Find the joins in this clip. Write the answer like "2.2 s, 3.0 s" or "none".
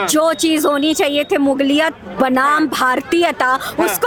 none